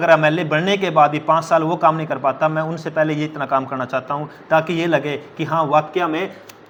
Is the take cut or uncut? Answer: uncut